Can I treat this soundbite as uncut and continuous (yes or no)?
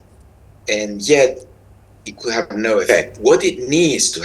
no